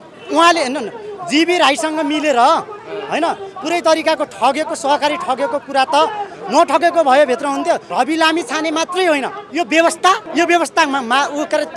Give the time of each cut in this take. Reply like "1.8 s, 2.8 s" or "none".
7.9 s, 9.4 s, 10.2 s